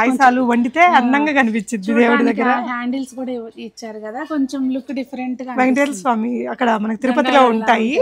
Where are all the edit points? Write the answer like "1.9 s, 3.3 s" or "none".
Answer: none